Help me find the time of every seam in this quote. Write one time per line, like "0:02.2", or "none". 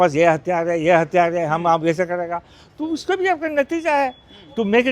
none

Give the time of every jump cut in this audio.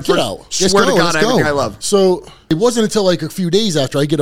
0:02.5

